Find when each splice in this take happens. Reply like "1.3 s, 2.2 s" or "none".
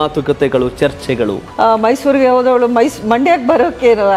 1.4 s